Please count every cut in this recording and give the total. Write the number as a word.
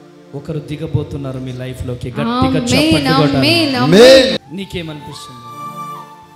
one